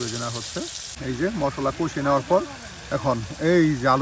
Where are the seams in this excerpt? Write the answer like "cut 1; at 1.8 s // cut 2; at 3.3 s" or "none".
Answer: cut 1; at 1.0 s